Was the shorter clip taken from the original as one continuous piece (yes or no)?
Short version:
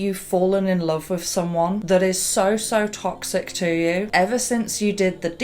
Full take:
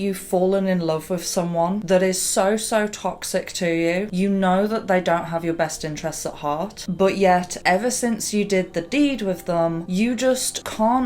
no